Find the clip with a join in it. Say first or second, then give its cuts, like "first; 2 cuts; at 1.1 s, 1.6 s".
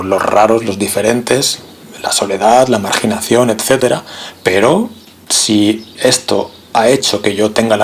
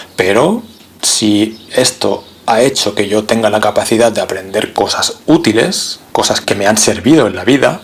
second; 2 cuts; at 4.7 s, 6.0 s